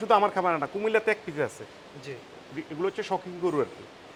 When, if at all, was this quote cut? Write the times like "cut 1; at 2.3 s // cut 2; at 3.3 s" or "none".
none